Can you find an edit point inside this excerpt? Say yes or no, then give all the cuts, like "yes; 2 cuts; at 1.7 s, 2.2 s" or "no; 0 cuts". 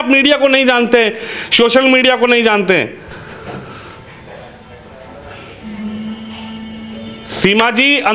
no; 0 cuts